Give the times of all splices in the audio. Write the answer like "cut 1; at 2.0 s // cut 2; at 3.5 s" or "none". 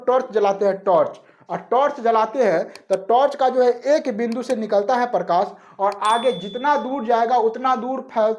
none